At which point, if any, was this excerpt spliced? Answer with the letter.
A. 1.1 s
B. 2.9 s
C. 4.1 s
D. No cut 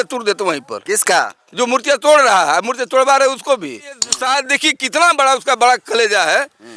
C